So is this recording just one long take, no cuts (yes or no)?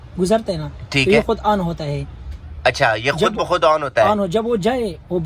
yes